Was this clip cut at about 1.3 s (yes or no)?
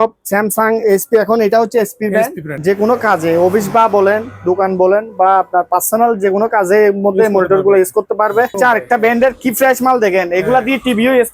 no